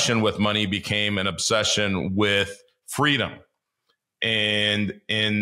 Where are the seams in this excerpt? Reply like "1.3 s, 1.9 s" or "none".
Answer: none